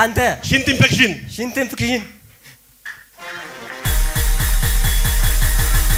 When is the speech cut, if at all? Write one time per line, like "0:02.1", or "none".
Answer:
none